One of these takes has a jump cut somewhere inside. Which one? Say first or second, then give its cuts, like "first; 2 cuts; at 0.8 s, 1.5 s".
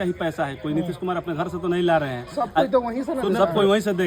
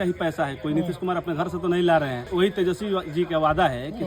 second; 1 cut; at 2.2 s